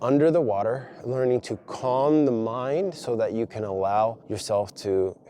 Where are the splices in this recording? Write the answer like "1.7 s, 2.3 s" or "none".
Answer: 4.3 s